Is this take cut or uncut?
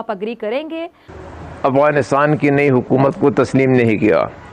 cut